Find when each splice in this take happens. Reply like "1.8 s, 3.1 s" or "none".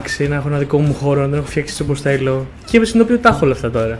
2.5 s